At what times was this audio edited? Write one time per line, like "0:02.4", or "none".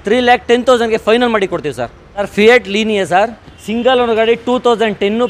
0:02.3